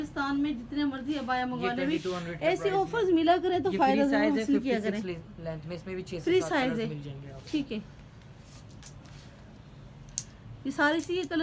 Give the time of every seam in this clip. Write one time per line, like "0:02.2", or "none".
none